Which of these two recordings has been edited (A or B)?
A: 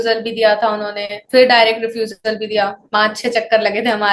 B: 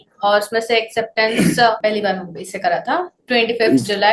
B